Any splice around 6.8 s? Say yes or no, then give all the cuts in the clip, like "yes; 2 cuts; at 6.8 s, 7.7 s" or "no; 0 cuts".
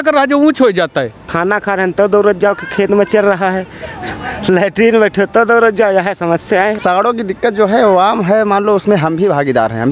yes; 2 cuts; at 1.2 s, 6.8 s